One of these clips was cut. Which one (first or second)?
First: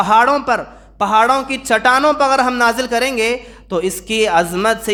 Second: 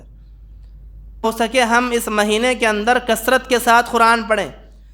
second